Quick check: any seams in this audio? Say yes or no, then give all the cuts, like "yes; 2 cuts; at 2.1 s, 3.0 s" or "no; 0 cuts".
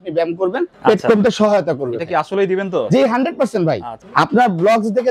yes; 1 cut; at 4.0 s